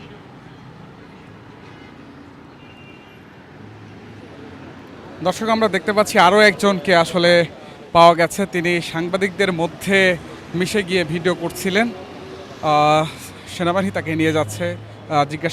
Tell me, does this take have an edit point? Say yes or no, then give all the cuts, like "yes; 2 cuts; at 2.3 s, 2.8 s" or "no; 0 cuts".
no; 0 cuts